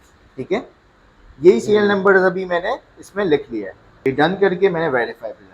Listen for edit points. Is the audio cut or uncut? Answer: cut